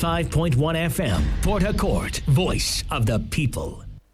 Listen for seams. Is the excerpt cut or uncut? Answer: uncut